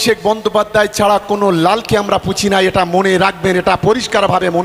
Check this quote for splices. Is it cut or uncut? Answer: uncut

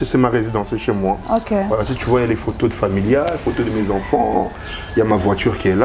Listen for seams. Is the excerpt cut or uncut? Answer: uncut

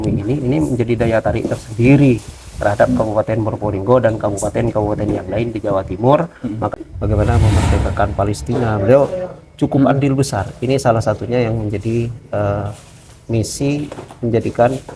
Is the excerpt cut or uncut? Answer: cut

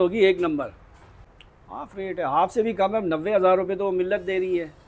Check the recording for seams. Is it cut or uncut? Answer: cut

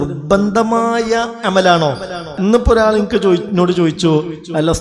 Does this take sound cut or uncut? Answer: cut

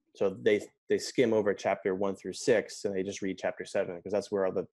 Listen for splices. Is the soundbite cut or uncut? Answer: uncut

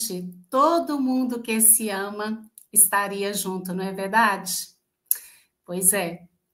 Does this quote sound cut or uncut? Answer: uncut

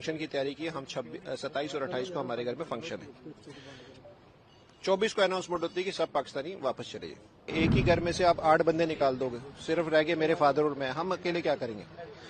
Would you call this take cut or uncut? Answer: cut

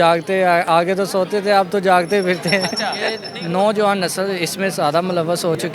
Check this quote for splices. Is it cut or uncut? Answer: cut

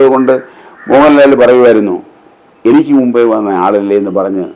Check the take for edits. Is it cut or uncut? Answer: uncut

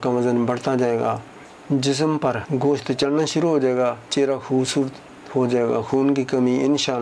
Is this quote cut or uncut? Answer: cut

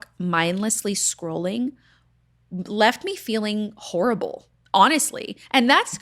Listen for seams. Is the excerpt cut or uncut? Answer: uncut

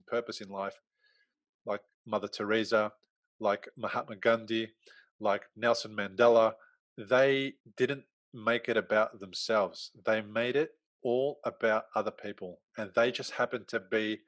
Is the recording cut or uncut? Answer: cut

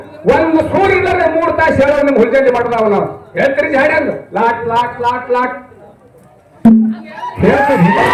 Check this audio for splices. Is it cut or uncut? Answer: uncut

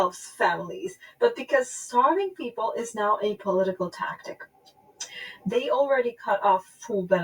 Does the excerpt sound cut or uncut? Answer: cut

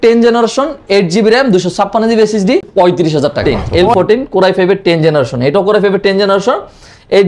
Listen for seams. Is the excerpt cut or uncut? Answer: cut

